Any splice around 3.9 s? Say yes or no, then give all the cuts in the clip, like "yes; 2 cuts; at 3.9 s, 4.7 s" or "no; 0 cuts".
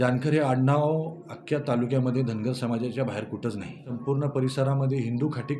yes; 1 cut; at 3.9 s